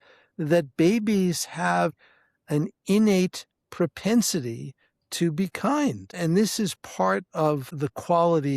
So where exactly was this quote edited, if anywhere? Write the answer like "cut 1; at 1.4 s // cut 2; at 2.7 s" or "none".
cut 1; at 2.0 s // cut 2; at 6.2 s